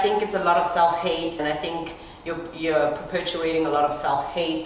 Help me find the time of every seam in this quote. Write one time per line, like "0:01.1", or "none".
0:01.4